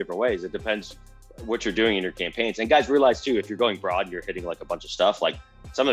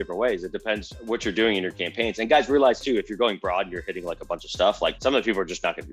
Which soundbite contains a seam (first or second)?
second